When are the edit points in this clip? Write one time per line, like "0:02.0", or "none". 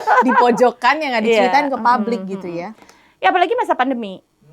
none